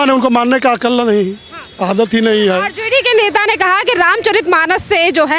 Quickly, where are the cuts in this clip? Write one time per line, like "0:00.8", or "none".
none